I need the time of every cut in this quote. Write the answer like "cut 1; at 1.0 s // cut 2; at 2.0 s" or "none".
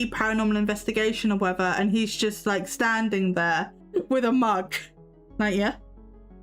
cut 1; at 3.8 s